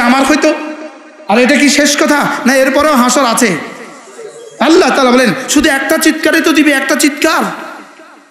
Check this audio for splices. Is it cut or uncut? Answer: uncut